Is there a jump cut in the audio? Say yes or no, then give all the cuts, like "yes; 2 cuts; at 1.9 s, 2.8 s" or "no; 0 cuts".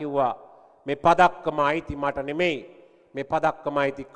no; 0 cuts